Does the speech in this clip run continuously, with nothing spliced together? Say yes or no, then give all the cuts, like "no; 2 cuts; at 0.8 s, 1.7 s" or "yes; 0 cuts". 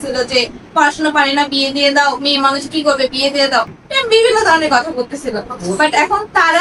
yes; 0 cuts